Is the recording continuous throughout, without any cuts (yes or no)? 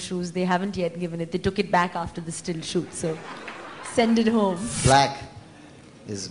no